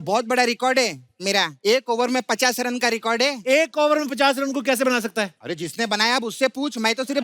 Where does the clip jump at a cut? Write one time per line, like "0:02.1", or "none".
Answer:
0:01.5
0:05.4

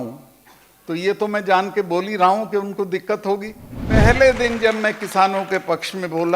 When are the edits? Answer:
0:04.0

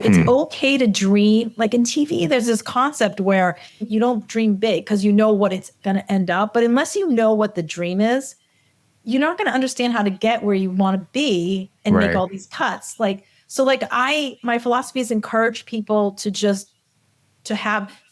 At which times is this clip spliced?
0:03.9

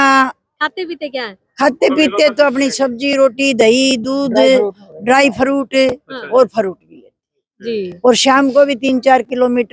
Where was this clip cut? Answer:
none

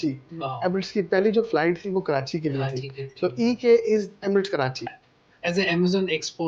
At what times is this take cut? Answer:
0:05.0

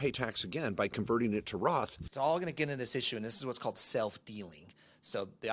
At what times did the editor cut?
0:02.0

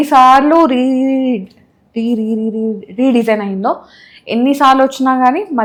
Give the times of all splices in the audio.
none

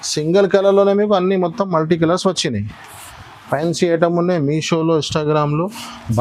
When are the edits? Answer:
none

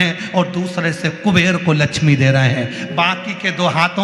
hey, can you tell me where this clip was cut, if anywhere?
none

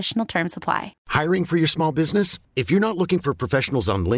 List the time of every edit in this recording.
0:01.0

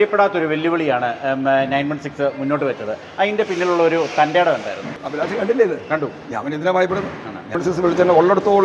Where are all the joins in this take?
0:05.0
0:07.5

